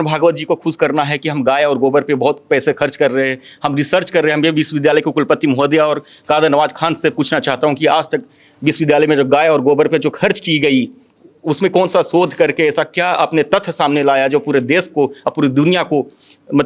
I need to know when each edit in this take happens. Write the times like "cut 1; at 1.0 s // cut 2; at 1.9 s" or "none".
none